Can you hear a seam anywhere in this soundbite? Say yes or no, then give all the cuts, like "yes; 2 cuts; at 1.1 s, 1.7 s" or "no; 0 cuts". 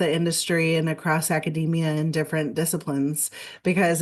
no; 0 cuts